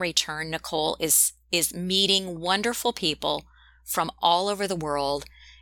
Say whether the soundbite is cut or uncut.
uncut